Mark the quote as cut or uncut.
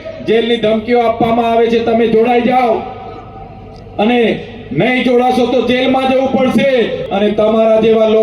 cut